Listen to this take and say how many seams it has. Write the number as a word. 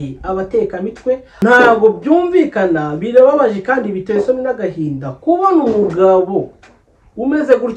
one